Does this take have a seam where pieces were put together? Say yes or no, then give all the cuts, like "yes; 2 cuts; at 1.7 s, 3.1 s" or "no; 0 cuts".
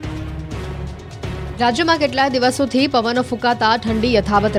no; 0 cuts